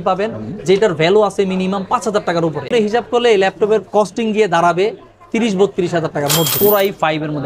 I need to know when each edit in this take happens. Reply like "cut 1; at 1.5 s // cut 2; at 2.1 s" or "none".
cut 1; at 2.7 s // cut 2; at 6.5 s